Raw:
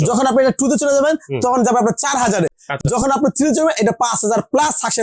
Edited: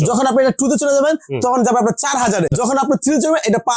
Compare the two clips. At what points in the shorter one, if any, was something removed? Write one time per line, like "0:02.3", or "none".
0:02.7